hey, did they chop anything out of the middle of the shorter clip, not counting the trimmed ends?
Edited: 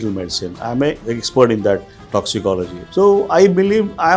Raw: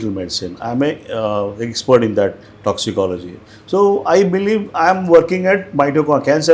yes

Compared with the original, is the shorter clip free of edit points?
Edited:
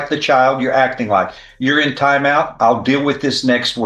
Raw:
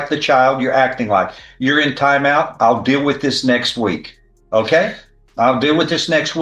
yes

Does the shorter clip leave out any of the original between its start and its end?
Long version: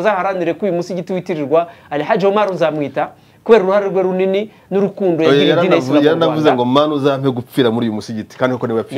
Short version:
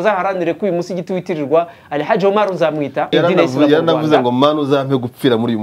yes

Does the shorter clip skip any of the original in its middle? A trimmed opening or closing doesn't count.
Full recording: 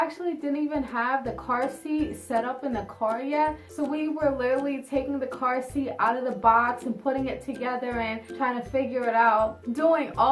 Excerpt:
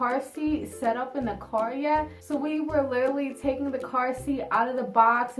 no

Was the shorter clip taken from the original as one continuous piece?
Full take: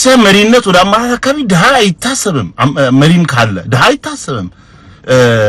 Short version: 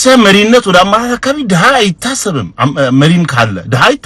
yes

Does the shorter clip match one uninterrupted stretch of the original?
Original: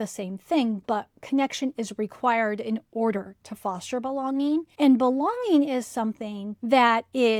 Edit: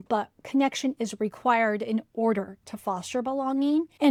yes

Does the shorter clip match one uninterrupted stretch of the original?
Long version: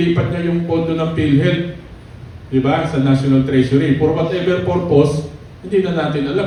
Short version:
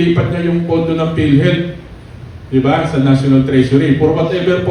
yes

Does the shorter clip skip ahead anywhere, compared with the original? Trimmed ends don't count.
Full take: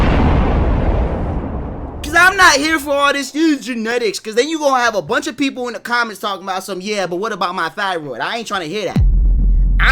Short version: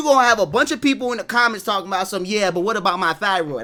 no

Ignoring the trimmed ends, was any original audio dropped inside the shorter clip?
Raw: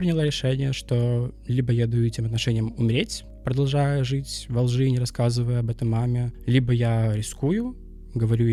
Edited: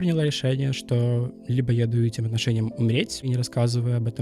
yes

